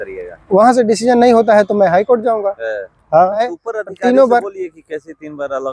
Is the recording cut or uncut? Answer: cut